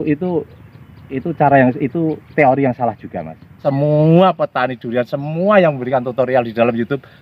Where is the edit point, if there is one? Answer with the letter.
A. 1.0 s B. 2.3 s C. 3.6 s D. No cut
C